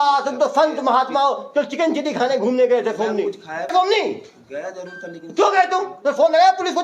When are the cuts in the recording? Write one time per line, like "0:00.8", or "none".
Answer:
0:03.7